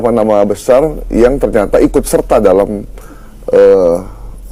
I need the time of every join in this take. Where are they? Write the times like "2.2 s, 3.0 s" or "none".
none